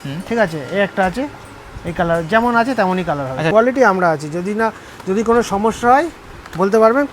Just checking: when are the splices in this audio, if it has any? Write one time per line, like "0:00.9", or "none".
0:03.5

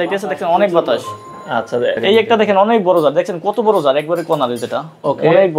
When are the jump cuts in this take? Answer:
0:02.0

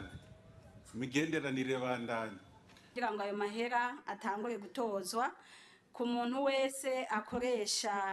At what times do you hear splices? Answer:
0:02.8

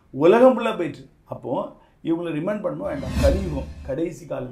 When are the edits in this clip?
0:03.1

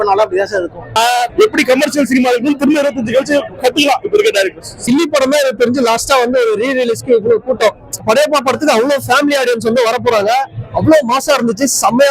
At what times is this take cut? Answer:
0:00.9
0:04.8
0:08.0

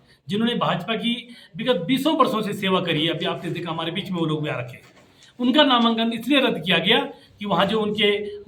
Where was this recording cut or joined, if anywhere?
none

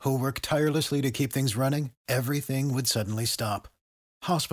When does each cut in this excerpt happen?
none

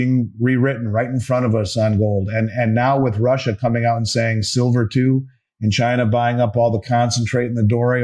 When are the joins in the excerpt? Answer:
none

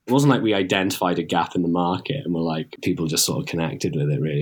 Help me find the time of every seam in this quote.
0:02.7

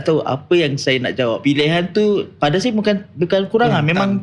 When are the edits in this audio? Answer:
0:01.4

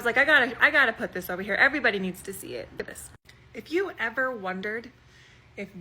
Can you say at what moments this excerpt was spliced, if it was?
0:02.8

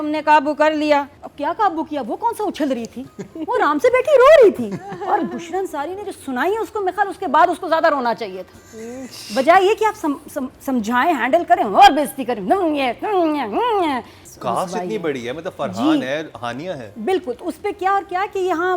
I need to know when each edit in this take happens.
0:01.2
0:14.2

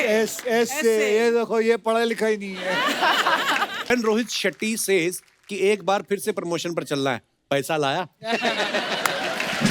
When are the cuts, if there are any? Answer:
0:03.9

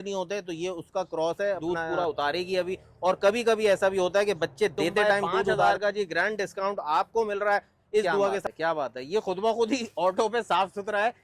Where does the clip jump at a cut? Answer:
0:01.6
0:05.6
0:08.4

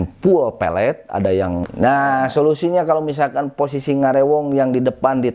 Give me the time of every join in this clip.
0:01.7

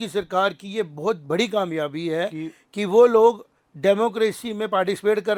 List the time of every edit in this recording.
none

